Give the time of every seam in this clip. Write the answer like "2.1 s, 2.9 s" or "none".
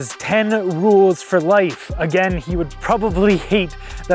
none